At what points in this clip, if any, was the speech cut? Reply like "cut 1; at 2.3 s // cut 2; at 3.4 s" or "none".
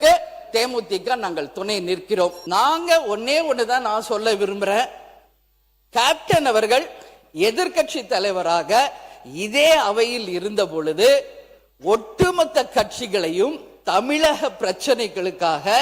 cut 1; at 2.4 s